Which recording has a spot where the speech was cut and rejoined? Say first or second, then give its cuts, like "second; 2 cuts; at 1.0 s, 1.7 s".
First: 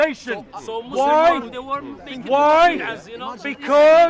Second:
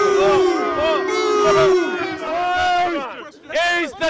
second; 1 cut; at 2.2 s